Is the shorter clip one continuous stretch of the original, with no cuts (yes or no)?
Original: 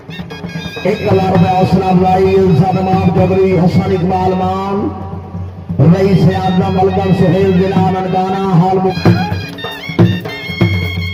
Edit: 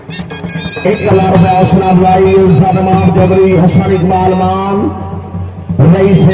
yes